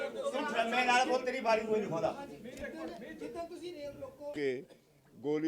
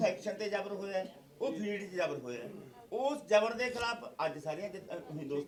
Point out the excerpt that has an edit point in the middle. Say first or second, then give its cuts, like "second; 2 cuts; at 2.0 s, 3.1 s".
first; 1 cut; at 4.3 s